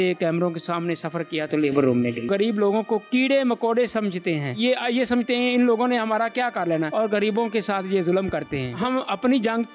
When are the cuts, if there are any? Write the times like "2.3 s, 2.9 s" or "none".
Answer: 2.3 s, 8.8 s

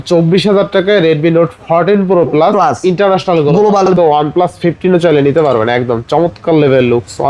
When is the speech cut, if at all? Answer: 3.9 s

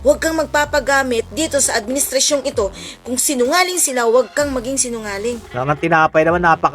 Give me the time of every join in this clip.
5.4 s

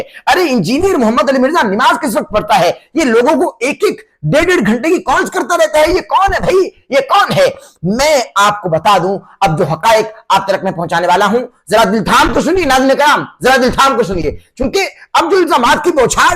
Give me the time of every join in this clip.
none

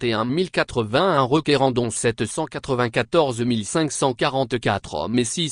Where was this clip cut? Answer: 1.4 s

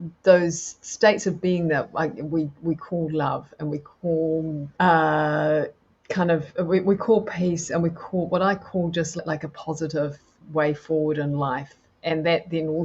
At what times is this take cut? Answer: none

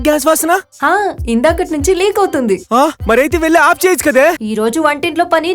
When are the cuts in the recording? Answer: 3.0 s, 4.4 s

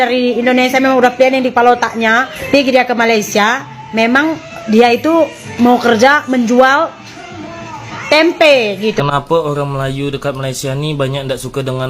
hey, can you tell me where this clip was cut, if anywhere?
2.3 s, 9.0 s

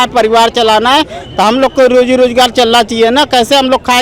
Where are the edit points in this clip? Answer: none

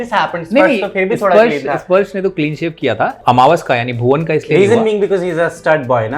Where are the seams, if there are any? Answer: 3.2 s

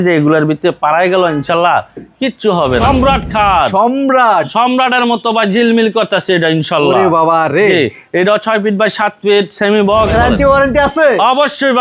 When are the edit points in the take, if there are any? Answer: 2.8 s, 10.1 s

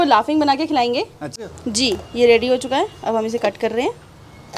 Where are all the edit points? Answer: 1.6 s

